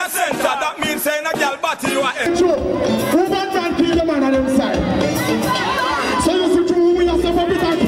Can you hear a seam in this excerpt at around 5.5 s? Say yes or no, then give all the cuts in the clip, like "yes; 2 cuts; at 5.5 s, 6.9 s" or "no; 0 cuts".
no; 1 cut; at 2.3 s